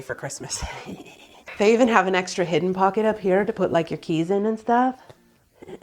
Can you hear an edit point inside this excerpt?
yes; 1 cut; at 1.4 s

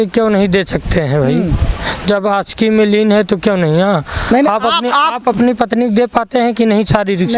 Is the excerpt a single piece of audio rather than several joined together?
yes; 0 cuts

